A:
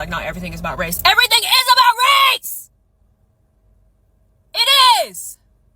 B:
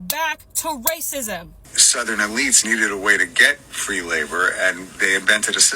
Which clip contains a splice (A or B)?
B